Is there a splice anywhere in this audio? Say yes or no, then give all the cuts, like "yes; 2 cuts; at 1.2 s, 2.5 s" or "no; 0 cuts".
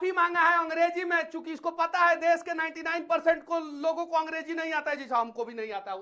no; 0 cuts